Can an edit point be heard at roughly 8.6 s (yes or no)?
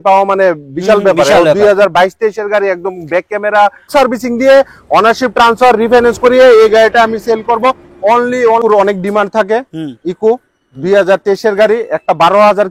yes